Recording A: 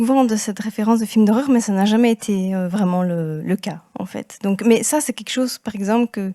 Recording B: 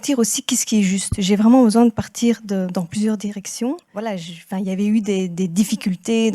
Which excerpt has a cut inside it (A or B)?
B